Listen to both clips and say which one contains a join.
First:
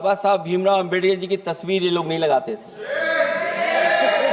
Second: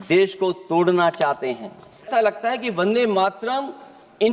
second; 1 cut; at 2.1 s

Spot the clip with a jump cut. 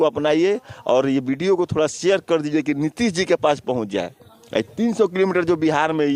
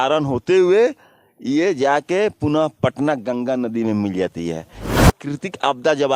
second; 1 cut; at 5.0 s

